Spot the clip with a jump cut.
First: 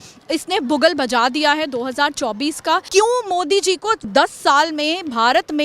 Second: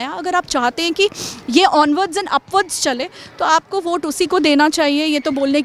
first; 2 cuts; at 2.9 s, 4.0 s

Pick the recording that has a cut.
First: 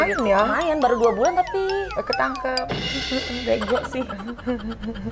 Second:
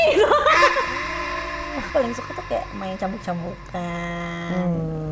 second; 1 cut; at 1.8 s

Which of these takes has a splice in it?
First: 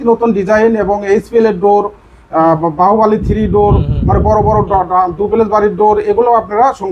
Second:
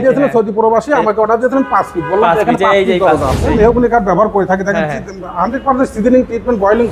second; 1 cut; at 3.5 s

